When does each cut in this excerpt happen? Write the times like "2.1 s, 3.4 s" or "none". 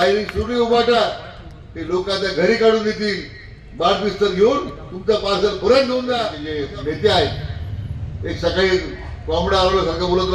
6.5 s